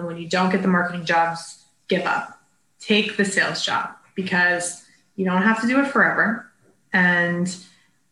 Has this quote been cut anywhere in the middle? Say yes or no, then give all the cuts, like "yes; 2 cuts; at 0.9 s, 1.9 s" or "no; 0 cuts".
no; 0 cuts